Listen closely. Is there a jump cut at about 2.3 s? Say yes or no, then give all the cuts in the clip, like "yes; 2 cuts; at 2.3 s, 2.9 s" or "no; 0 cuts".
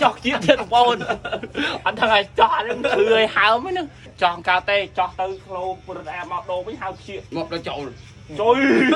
no; 2 cuts; at 4.0 s, 7.2 s